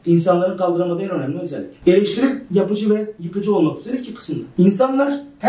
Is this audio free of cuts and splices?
yes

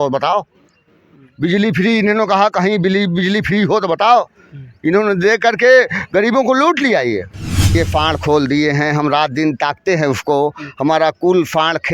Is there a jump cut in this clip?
yes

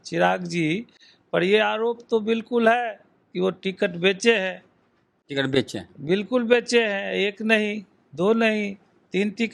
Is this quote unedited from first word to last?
yes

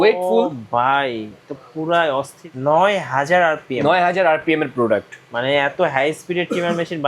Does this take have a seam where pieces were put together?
yes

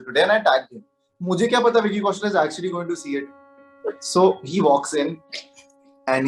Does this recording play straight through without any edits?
yes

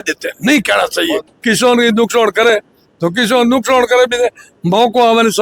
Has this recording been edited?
yes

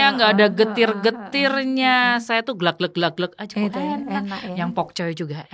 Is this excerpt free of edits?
yes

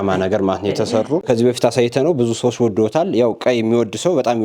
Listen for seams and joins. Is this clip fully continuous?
no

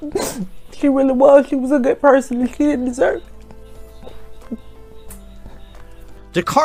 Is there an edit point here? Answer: no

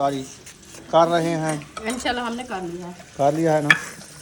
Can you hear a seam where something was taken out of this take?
no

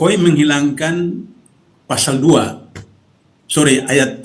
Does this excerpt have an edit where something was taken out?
no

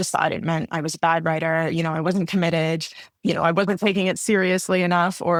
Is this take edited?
no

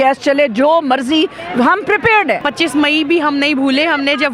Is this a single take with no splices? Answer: no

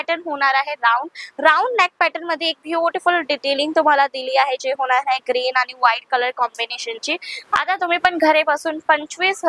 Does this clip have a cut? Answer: yes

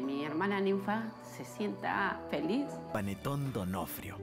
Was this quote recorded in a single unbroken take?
no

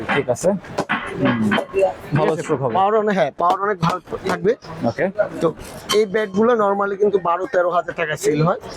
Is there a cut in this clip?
no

